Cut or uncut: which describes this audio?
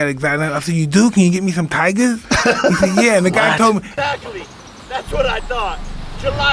uncut